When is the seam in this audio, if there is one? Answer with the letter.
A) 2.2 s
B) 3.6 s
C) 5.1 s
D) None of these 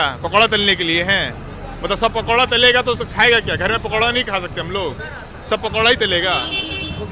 D